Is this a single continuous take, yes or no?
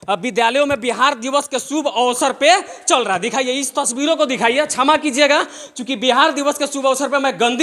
yes